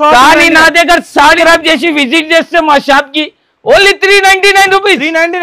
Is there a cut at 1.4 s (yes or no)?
yes